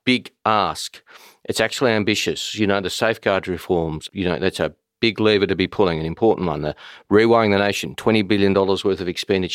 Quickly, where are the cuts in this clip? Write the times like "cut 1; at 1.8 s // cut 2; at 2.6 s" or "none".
cut 1; at 4.0 s